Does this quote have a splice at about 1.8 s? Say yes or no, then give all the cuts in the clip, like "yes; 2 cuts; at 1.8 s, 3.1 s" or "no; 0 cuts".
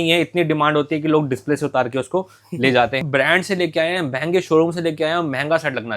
no; 1 cut; at 3.0 s